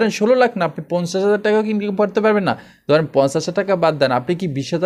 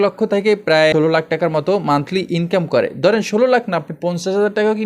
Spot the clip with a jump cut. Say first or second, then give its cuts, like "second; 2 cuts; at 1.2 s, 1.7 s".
second; 1 cut; at 0.9 s